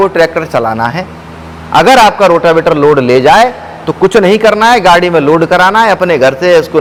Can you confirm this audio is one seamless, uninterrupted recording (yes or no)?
yes